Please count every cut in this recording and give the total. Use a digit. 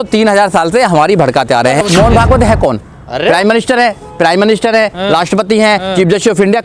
1